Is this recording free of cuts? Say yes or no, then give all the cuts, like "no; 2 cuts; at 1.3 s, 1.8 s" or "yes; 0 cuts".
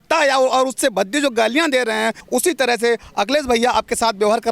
no; 1 cut; at 2.2 s